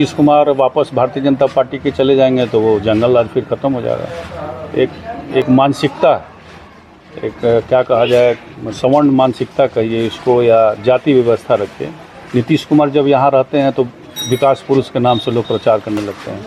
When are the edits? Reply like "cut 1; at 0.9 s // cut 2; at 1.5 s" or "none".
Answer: none